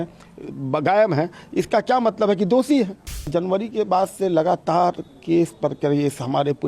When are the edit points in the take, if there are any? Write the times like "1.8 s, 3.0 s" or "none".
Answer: 3.3 s